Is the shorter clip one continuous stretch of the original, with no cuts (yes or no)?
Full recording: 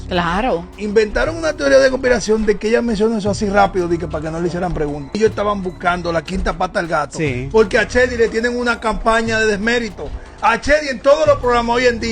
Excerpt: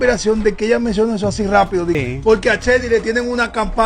no